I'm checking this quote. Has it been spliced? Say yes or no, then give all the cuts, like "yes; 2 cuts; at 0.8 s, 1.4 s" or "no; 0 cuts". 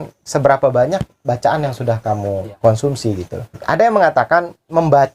yes; 2 cuts; at 2.5 s, 3.6 s